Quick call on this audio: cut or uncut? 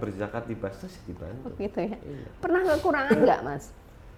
uncut